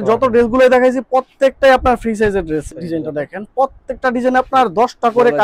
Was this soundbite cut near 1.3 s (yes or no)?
no